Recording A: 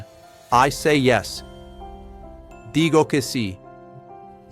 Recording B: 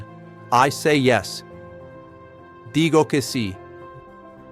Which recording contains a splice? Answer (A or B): B